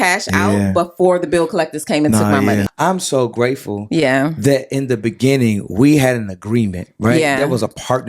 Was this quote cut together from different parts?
yes; 1 cut; at 2.7 s

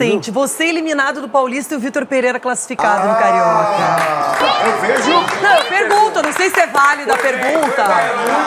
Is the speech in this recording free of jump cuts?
yes; 0 cuts

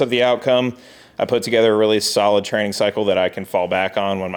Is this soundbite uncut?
yes; 0 cuts

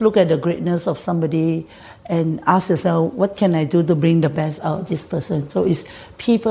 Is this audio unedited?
yes; 0 cuts

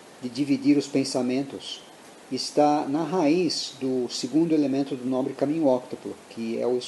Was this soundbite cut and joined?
yes; 1 cut; at 2.6 s

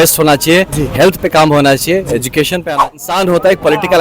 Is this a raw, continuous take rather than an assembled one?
no; 1 cut; at 3.0 s

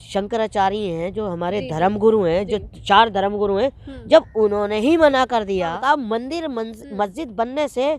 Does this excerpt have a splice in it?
yes; 1 cut; at 5.8 s

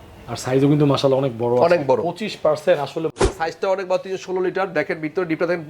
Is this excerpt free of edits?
no; 1 cut; at 3.1 s

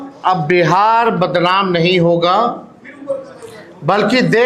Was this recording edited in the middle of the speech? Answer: no; 0 cuts

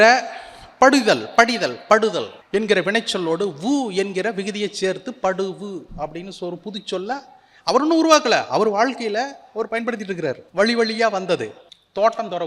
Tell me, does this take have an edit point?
yes; 2 cuts; at 10.4 s, 11.6 s

